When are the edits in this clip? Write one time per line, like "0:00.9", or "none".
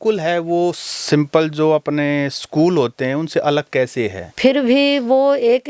0:04.2